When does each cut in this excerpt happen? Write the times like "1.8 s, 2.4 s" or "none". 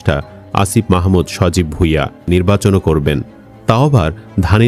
2.3 s